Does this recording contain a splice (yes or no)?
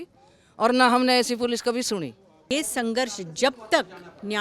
yes